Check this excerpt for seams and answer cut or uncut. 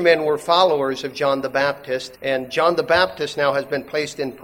cut